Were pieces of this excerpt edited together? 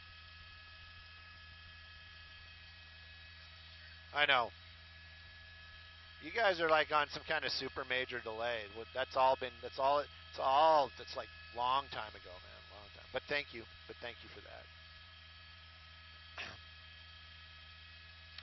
yes; 1 cut; at 10.3 s

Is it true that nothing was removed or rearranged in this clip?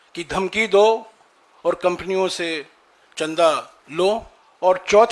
yes; 0 cuts

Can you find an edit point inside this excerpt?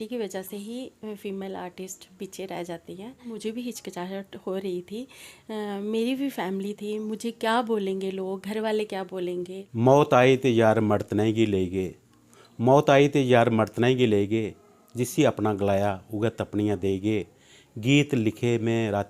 yes; 2 cuts; at 3.4 s, 9.6 s

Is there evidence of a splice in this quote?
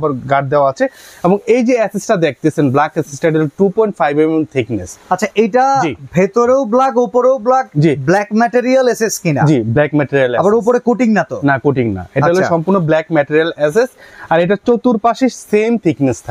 no; 0 cuts

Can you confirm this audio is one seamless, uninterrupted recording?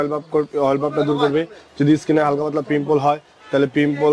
yes; 0 cuts

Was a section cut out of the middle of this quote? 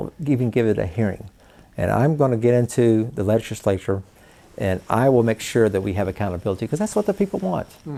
no; 0 cuts

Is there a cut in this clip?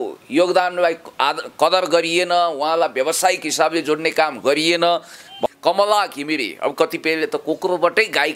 yes; 1 cut; at 5.5 s

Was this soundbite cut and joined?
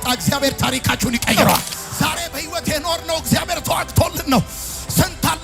yes; 1 cut; at 1.8 s

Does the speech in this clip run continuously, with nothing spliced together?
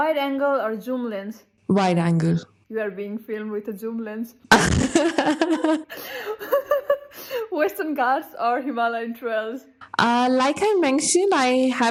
yes; 0 cuts

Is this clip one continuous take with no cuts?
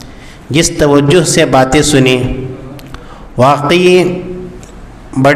yes; 0 cuts

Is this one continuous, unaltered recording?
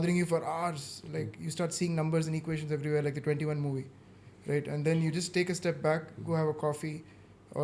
yes; 0 cuts

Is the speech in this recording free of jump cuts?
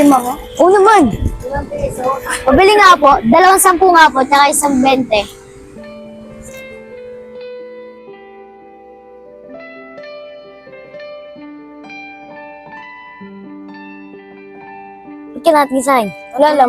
yes; 0 cuts

